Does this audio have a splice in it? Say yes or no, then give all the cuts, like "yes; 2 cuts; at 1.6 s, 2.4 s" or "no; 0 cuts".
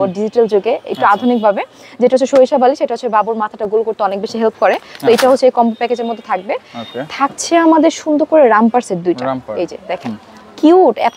no; 0 cuts